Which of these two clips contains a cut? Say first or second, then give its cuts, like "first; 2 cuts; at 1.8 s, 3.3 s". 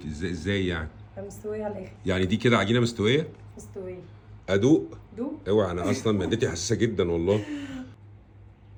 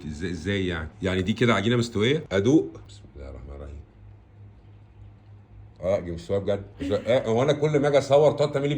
second; 5 cuts; at 0.9 s, 2.3 s, 2.8 s, 5.8 s, 6.7 s